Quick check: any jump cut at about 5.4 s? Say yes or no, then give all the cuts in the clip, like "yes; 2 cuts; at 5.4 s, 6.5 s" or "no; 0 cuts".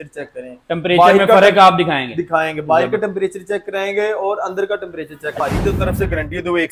yes; 1 cut; at 5.4 s